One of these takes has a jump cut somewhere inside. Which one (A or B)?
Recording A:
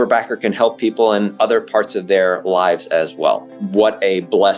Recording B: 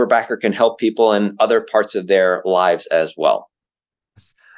A